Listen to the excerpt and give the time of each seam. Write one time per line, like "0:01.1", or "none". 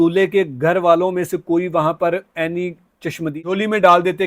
0:03.4

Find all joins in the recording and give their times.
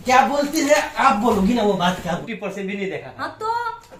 0:02.3

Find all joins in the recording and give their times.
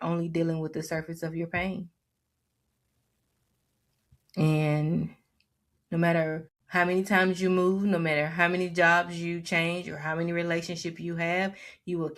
0:06.5

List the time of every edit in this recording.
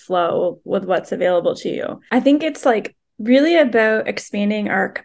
0:01.9

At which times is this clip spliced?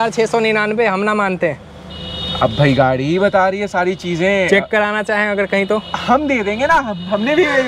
none

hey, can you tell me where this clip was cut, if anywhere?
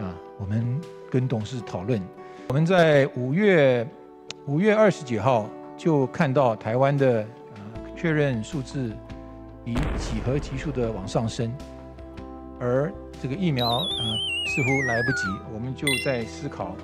0:02.5

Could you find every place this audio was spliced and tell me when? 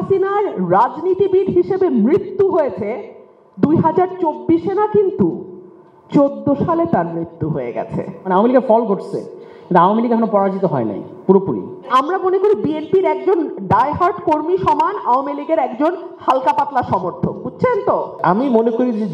0:08.3
0:11.9
0:18.2

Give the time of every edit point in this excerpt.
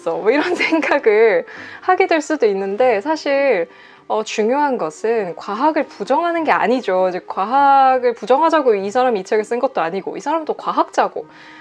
none

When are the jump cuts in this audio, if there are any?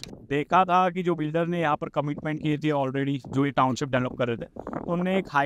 none

